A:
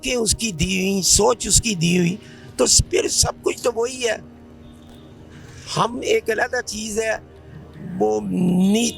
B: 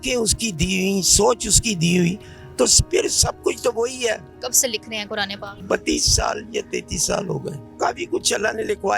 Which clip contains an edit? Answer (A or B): B